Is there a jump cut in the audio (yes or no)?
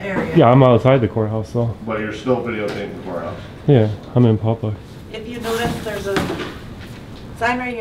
no